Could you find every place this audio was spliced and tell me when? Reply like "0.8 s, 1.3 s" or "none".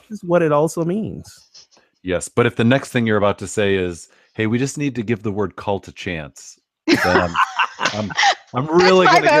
none